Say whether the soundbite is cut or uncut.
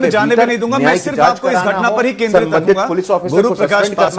uncut